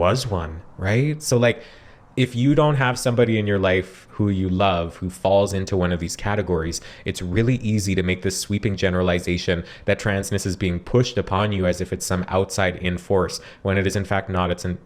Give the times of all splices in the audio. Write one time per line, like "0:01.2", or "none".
none